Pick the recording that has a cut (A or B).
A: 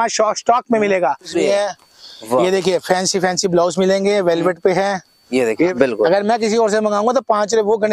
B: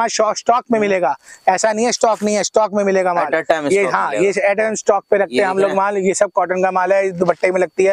A